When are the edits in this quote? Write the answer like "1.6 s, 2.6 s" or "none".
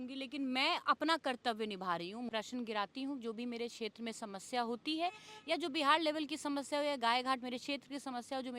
2.3 s